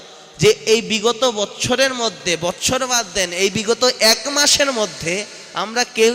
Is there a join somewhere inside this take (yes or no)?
no